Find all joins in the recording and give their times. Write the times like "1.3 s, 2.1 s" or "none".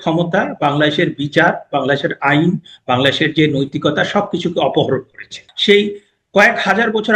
5.5 s